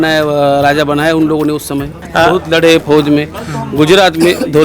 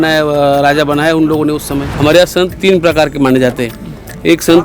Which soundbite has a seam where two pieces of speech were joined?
second; 1 cut; at 1.8 s

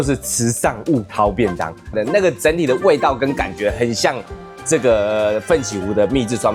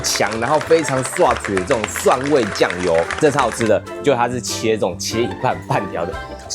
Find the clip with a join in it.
second; 1 cut; at 3.9 s

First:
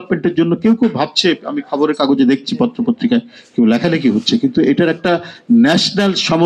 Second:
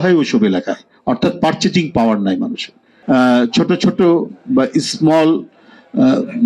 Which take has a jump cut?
second; 1 cut; at 2.9 s

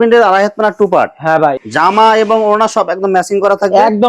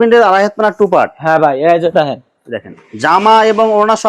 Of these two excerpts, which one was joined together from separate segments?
first; 1 cut; at 1.6 s

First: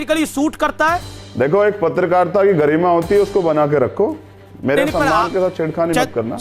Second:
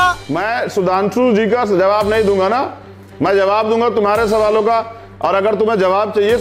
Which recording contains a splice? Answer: first; 1 cut; at 1.2 s

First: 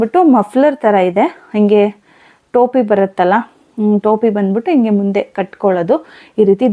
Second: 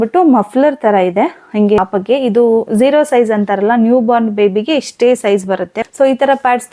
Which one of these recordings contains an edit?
second; 2 cuts; at 1.8 s, 5.8 s

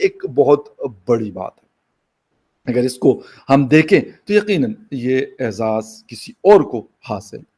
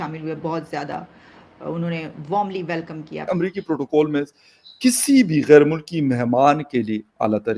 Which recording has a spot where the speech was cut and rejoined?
second; 1 cut; at 3.2 s

